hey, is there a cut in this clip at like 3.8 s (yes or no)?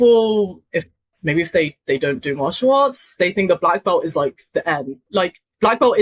no